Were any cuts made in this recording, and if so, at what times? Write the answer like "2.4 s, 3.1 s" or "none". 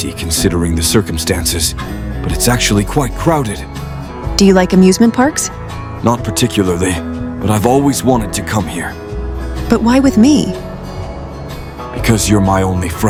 none